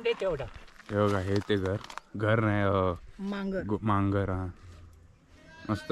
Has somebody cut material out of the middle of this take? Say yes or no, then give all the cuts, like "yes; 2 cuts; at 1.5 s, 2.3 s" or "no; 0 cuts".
no; 0 cuts